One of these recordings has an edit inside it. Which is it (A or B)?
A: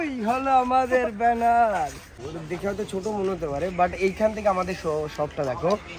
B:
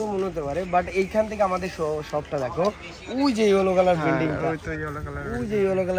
A